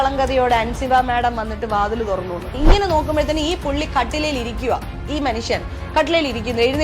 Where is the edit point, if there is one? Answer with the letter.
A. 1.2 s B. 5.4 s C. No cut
B